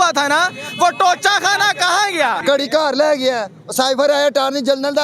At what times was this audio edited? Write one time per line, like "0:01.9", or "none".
0:02.4